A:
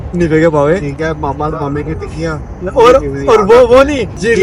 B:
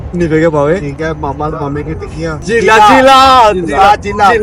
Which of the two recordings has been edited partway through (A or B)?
B